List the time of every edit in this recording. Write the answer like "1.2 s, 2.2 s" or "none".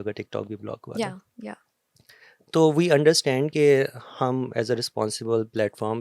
none